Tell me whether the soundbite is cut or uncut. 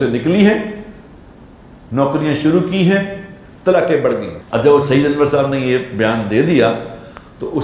cut